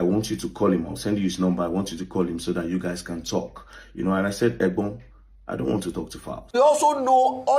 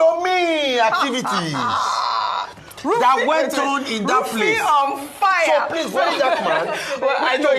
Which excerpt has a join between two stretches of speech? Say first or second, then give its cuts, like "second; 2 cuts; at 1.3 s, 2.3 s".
first; 1 cut; at 6.6 s